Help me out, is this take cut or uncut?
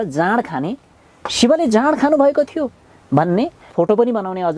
cut